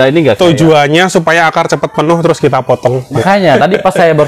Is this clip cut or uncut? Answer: cut